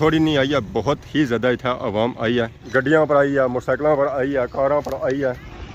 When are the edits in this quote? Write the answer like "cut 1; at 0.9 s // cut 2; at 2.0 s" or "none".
none